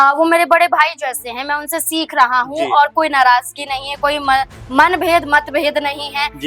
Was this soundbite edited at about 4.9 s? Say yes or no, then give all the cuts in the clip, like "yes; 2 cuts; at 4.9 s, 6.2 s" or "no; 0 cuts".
no; 0 cuts